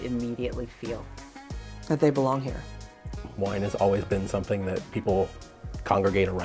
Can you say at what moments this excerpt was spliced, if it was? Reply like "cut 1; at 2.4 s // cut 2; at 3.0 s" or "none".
cut 1; at 3.3 s